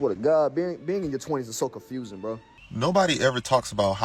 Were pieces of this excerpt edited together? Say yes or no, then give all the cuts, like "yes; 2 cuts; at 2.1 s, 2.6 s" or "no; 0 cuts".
yes; 1 cut; at 2.5 s